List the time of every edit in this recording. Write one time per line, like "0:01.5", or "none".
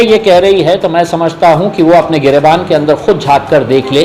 none